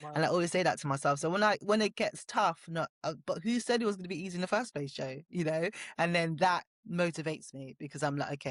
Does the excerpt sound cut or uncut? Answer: uncut